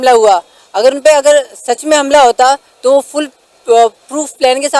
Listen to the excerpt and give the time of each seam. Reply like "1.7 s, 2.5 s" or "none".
none